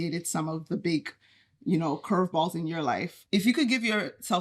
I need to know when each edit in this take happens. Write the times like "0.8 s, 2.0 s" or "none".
3.2 s